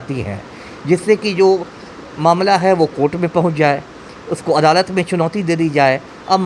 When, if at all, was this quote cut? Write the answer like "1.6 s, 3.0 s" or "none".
none